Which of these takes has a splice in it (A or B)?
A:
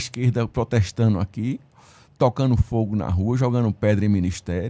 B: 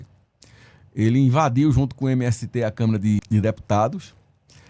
B